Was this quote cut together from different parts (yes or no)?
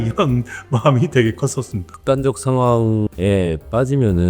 yes